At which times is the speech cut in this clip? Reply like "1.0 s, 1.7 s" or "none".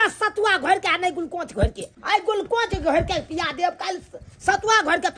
1.9 s